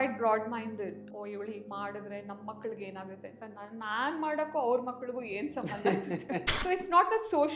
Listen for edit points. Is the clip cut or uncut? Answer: cut